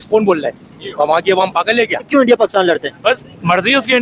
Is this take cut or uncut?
cut